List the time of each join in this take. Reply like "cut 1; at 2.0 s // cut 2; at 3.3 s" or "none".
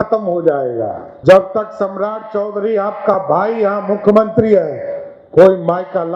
cut 1; at 1.0 s

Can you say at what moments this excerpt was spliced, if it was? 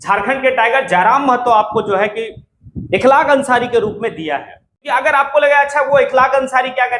cut 1; at 4.8 s

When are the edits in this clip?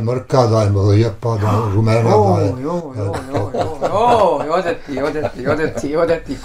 none

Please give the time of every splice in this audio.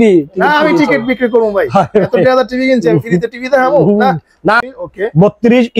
cut 1; at 4.6 s

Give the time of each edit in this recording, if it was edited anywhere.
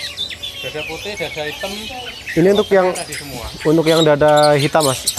none

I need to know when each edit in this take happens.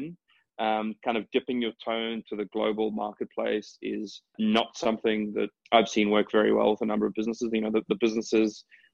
cut 1; at 4.3 s // cut 2; at 5.6 s

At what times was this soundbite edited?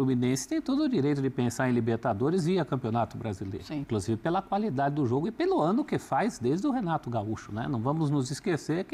cut 1; at 3.9 s

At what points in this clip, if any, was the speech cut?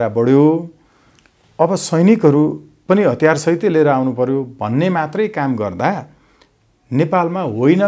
none

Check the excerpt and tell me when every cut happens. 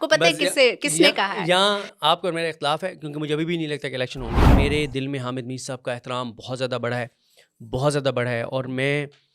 cut 1; at 4.5 s

